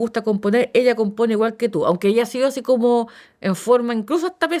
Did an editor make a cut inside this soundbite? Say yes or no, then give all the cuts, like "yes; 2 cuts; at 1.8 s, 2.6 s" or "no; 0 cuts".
no; 0 cuts